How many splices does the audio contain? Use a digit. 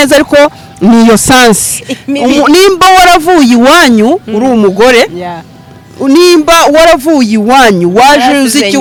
0